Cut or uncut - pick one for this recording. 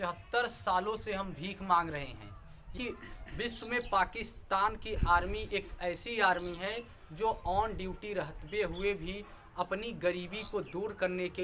cut